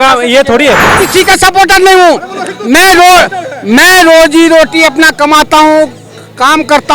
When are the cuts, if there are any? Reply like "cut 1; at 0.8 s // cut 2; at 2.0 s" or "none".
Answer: cut 1; at 0.9 s